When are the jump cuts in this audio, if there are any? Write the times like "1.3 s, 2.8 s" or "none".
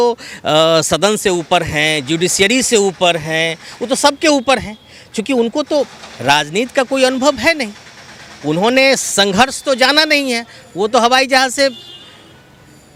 none